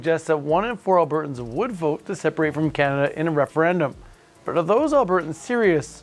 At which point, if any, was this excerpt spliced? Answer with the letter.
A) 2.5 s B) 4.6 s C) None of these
C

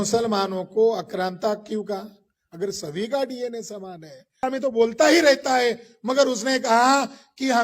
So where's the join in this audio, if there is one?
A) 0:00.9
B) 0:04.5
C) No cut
B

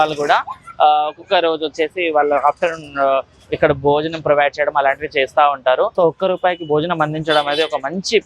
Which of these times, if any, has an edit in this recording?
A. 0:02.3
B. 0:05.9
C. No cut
B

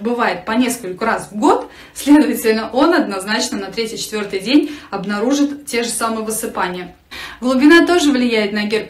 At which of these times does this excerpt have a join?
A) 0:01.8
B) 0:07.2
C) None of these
C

